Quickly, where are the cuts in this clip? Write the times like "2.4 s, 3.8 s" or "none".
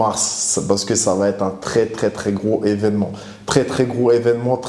none